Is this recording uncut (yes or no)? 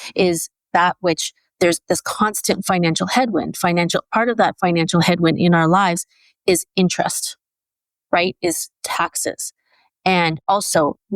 yes